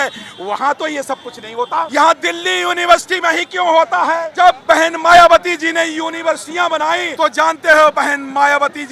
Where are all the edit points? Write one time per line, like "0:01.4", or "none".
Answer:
0:01.9
0:04.3
0:07.1

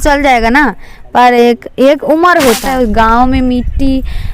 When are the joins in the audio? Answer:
0:02.7

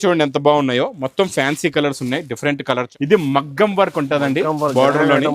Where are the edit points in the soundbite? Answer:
0:02.9

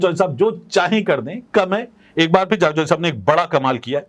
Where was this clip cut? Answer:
none

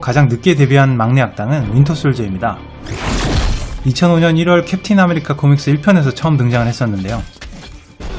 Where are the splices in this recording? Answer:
none

